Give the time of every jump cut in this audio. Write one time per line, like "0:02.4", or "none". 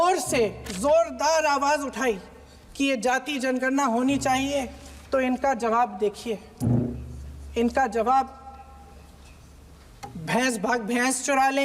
none